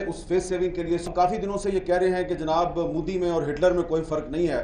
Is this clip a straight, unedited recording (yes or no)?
no